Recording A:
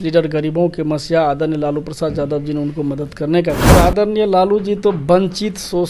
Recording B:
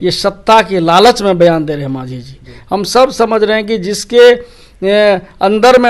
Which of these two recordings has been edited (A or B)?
A